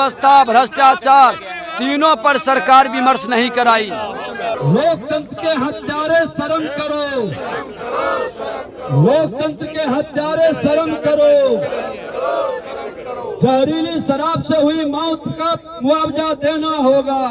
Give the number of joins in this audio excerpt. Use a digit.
1